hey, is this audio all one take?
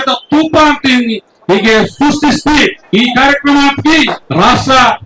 no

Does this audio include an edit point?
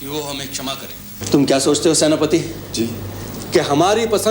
yes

